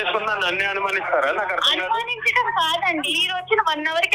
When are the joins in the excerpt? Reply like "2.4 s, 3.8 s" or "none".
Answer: 3.2 s